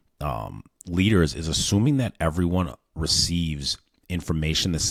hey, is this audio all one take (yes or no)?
yes